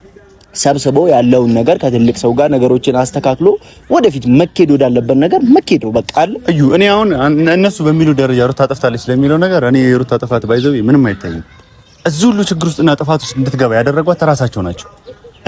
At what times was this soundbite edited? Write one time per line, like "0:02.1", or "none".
none